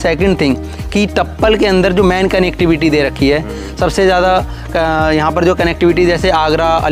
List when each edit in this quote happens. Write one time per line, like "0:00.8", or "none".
none